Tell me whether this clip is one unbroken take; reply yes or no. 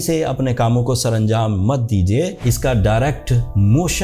no